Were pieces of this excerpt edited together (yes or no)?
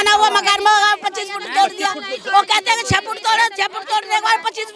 no